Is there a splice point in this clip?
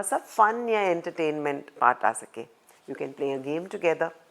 no; 0 cuts

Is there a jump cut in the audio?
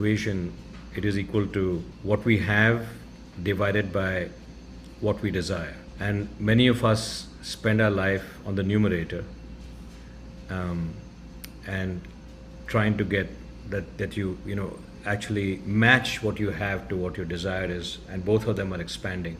no; 0 cuts

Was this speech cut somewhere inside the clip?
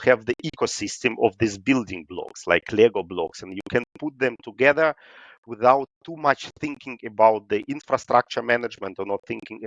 no; 0 cuts

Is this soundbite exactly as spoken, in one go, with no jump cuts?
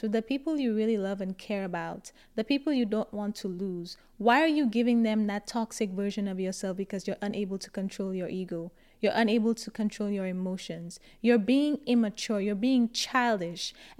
yes; 0 cuts

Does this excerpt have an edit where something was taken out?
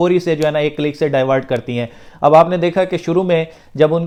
no; 0 cuts

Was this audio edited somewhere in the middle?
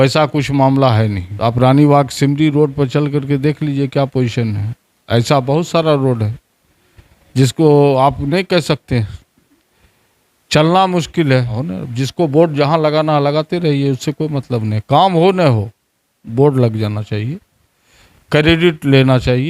yes; 2 cuts; at 1.2 s, 11.6 s

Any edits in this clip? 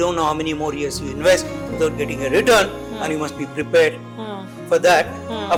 no; 0 cuts

